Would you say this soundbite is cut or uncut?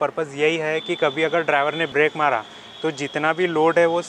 cut